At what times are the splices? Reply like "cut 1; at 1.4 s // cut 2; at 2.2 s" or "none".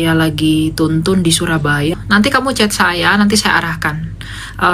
cut 1; at 1.9 s